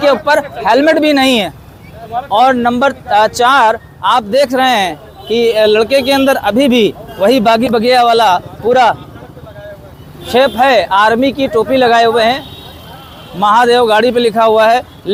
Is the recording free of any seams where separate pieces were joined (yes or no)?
yes